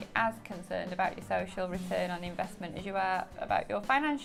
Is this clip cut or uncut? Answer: uncut